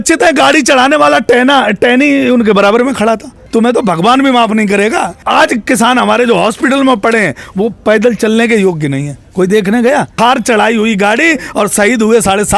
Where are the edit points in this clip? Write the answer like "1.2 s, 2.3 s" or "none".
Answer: 3.4 s, 5.2 s, 10.1 s